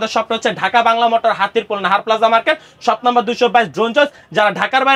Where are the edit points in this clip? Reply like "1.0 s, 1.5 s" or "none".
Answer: none

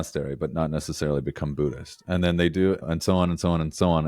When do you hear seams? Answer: 2.8 s

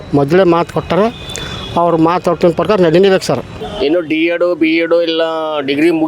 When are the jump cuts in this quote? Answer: 3.5 s

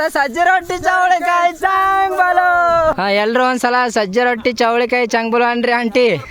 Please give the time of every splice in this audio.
3.0 s

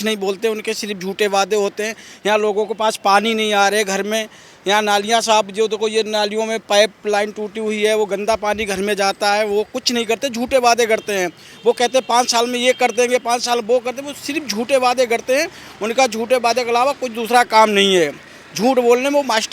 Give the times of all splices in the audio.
none

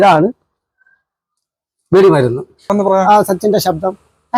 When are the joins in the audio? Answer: 2.7 s

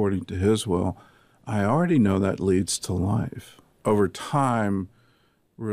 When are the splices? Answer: 3.8 s

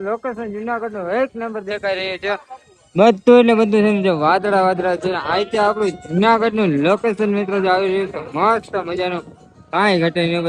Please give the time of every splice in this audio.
none

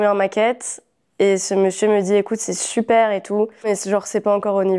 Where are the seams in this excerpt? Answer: 3.6 s

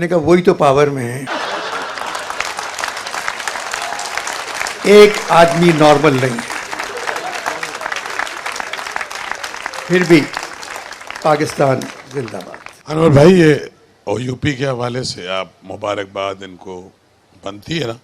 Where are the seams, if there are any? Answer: none

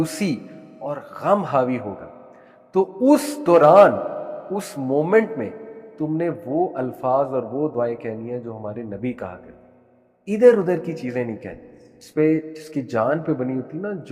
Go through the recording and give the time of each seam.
12.0 s

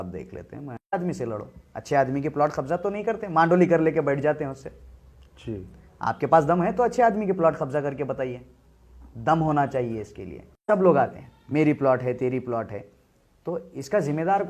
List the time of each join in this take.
0.9 s, 10.7 s

